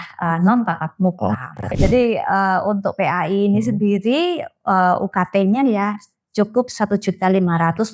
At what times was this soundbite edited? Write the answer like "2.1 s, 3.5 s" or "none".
1.7 s